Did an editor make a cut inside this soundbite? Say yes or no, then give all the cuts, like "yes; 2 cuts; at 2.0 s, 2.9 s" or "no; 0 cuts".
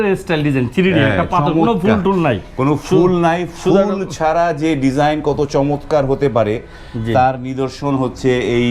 no; 0 cuts